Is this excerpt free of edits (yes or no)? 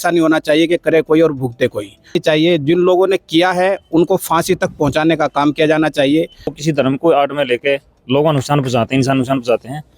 no